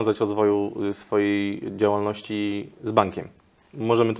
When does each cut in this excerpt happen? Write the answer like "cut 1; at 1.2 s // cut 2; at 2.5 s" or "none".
none